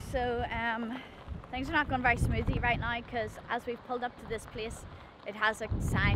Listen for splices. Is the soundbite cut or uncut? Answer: uncut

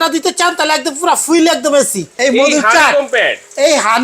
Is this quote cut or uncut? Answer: cut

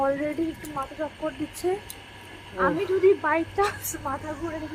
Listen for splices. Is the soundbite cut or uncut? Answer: uncut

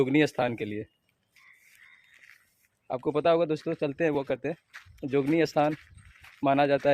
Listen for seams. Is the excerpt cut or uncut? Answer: uncut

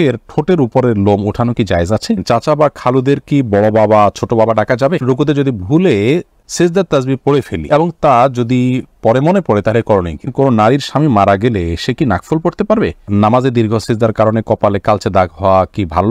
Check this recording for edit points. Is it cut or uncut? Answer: cut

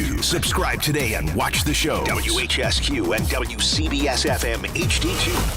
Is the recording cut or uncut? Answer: uncut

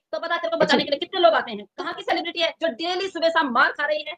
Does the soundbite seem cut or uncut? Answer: cut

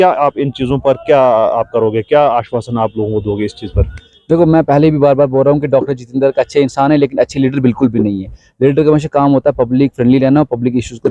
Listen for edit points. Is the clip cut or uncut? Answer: uncut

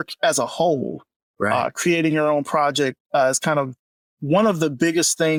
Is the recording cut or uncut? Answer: uncut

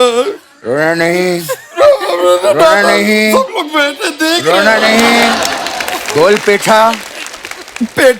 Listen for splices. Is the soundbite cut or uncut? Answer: uncut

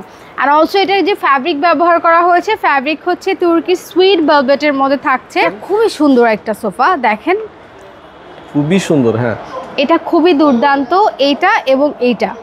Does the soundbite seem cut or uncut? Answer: cut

